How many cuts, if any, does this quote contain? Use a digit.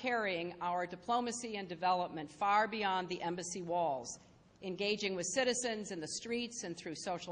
0